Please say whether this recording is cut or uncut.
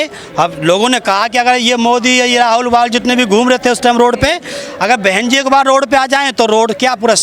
uncut